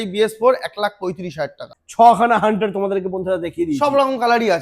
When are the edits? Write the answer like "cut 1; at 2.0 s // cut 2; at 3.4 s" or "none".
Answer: cut 1; at 1.7 s